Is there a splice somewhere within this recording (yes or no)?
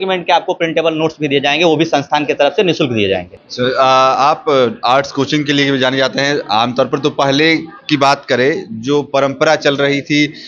no